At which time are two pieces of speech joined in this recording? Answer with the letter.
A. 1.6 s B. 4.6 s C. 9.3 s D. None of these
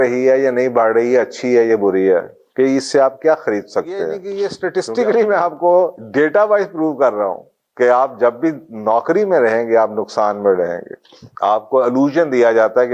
B